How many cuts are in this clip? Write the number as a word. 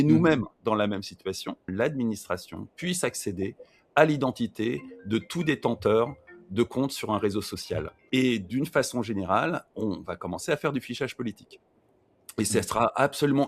two